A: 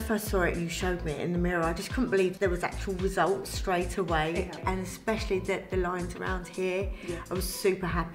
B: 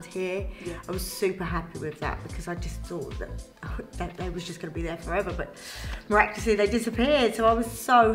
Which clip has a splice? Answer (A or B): A